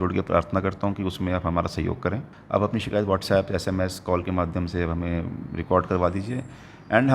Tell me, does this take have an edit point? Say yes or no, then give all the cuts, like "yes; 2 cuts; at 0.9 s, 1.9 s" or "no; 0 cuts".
yes; 1 cut; at 2.3 s